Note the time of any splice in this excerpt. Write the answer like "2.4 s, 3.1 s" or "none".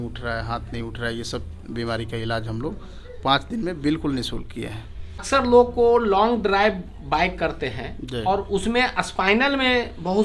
5.2 s